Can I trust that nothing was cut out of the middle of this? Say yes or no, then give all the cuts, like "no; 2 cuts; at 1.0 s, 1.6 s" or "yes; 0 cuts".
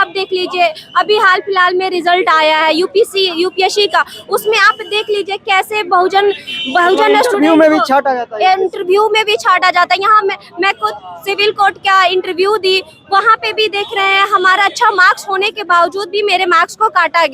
yes; 0 cuts